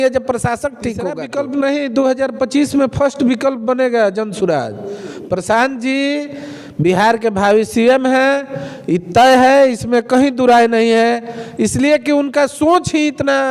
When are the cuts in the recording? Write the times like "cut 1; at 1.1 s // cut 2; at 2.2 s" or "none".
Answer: cut 1; at 1.0 s